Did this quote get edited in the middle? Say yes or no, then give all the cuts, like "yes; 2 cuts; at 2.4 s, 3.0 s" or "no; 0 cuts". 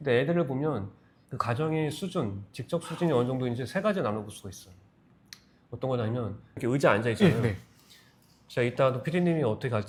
no; 0 cuts